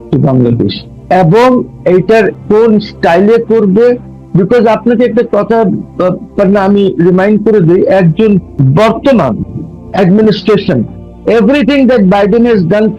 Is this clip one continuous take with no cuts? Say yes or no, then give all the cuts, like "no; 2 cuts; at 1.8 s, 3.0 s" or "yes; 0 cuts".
no; 3 cuts; at 1.1 s, 2.3 s, 8.5 s